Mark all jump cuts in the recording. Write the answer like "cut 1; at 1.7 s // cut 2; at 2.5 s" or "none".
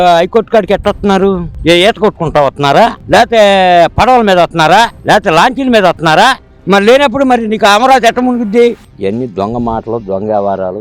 cut 1; at 6.5 s // cut 2; at 8.8 s